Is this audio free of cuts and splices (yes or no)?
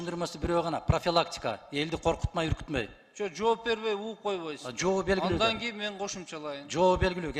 yes